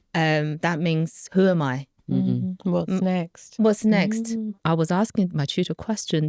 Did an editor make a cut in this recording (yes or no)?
yes